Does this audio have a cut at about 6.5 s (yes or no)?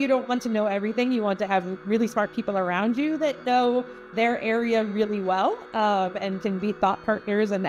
no